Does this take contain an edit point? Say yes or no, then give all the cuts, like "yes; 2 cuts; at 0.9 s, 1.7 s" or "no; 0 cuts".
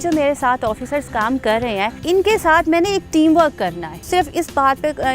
yes; 2 cuts; at 2.0 s, 4.0 s